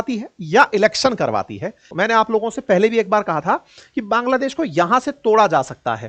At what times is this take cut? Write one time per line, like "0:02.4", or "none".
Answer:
0:01.9

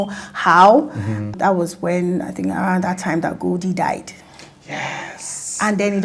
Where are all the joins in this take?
none

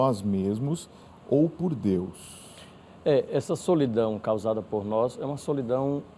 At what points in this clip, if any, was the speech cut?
none

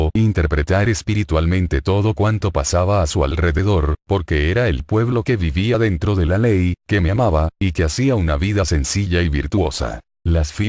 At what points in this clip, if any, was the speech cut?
0:01.2

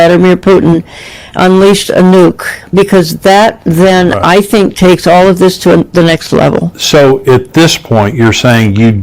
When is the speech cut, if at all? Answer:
0:06.7

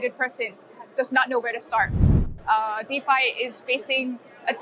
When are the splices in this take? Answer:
0:02.2

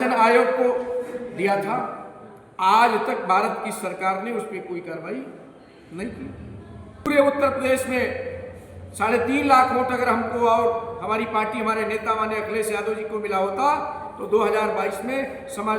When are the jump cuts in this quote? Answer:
0:07.1

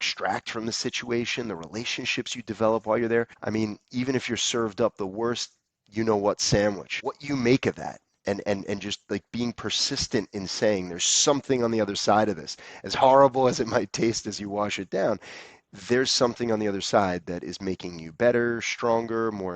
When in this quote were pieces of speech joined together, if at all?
0:03.4
0:06.9

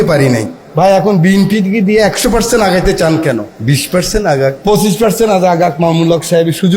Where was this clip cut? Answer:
0:03.5
0:04.6

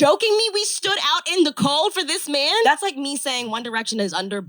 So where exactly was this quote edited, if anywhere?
0:02.7

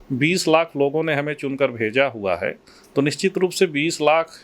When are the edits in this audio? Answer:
none

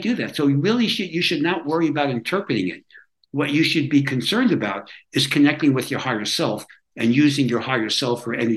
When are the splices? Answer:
none

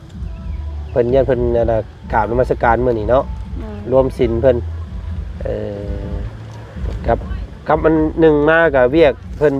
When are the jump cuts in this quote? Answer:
none

